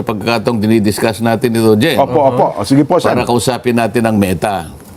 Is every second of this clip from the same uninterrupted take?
yes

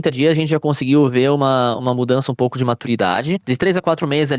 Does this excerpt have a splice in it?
no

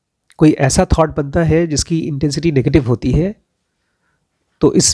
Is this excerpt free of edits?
yes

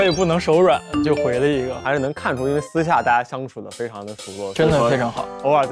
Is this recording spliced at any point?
yes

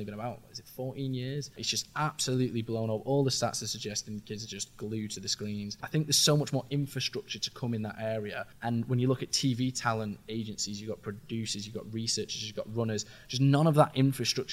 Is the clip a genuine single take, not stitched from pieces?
no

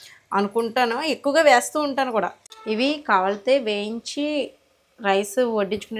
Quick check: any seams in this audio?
yes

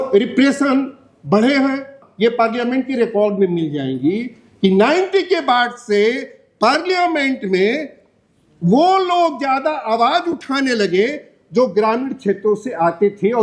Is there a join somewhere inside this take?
yes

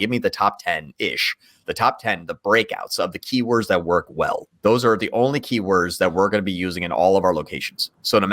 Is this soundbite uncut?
no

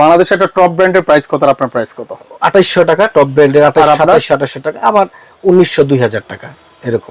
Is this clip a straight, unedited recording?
yes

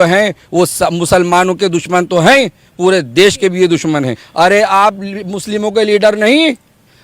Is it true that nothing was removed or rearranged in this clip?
no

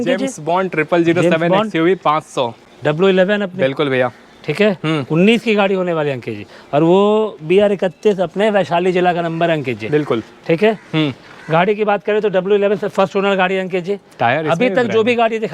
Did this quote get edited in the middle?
no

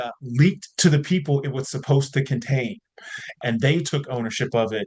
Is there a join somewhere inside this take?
yes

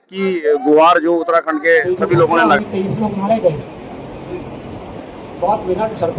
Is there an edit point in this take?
yes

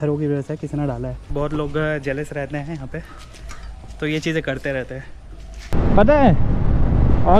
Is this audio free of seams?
no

